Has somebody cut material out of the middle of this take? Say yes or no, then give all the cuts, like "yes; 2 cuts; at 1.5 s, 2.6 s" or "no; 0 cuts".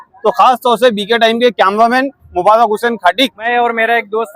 yes; 1 cut; at 3.4 s